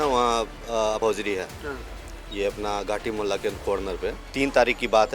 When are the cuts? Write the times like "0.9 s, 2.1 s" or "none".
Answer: 1.0 s, 4.2 s

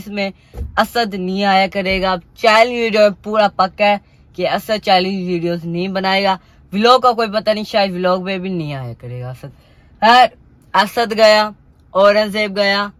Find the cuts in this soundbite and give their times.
none

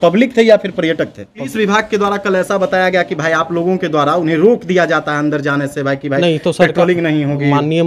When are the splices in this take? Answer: 1.5 s

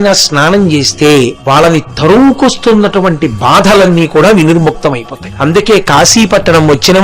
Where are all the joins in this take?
1.4 s, 5.2 s

